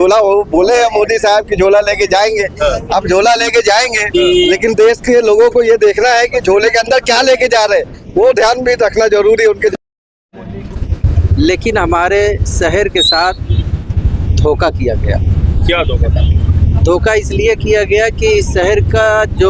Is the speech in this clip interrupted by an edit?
yes; 1 cut; at 10.7 s

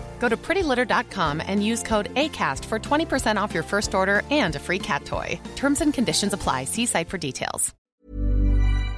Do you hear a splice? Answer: yes; 1 cut; at 7.7 s

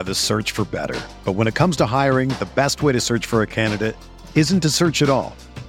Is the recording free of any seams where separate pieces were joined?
yes; 0 cuts

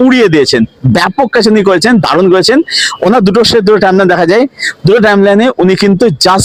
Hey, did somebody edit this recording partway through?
no; 0 cuts

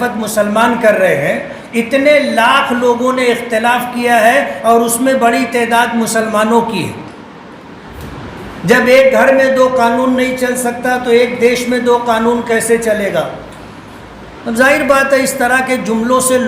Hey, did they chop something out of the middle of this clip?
yes; 1 cut; at 7.9 s

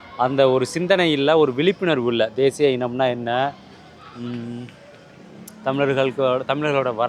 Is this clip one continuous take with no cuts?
yes; 0 cuts

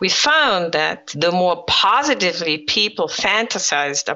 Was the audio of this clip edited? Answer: yes; 1 cut; at 1.0 s

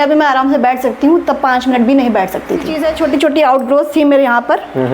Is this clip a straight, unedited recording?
no; 1 cut; at 2.7 s

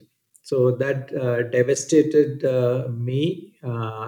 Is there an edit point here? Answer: no; 0 cuts

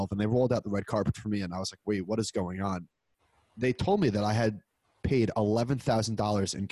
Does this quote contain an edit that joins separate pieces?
no; 0 cuts

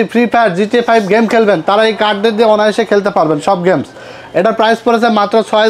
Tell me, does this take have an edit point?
no; 0 cuts

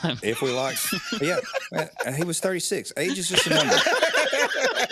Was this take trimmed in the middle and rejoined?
no; 0 cuts

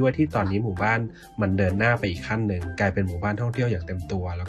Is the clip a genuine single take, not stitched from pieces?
yes; 0 cuts

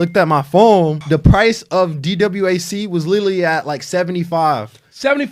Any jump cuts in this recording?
yes; 1 cut; at 1.0 s

